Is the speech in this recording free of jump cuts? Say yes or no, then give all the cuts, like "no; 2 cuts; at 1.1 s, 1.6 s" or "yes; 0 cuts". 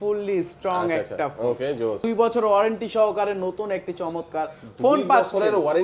no; 1 cut; at 2.0 s